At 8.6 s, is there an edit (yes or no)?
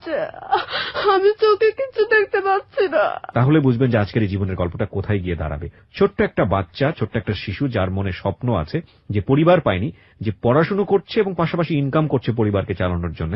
no